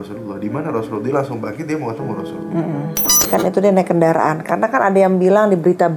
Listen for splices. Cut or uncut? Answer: cut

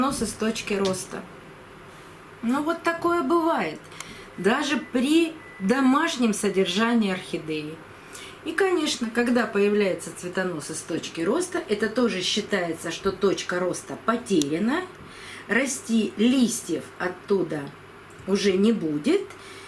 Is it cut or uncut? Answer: uncut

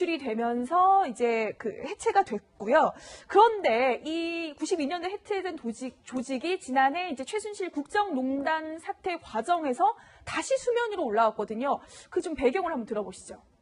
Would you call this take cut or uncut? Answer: uncut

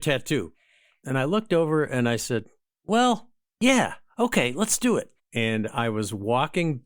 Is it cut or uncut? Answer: cut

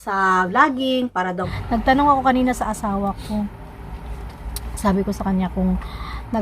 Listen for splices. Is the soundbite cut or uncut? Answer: cut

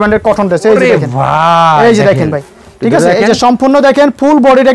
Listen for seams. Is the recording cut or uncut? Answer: uncut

